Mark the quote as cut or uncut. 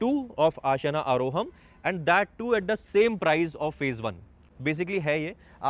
cut